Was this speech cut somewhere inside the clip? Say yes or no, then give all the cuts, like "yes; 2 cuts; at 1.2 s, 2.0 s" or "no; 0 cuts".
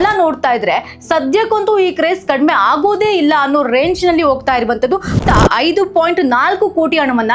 yes; 1 cut; at 5.2 s